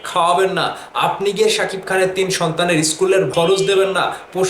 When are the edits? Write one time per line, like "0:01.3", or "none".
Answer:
0:03.3